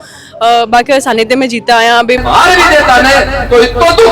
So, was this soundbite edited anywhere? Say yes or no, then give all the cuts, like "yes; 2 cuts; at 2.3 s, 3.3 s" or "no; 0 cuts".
yes; 1 cut; at 2.2 s